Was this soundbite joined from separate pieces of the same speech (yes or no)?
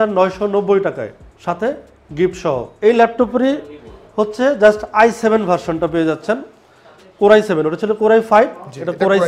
no